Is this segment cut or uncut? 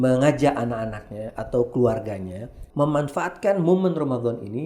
cut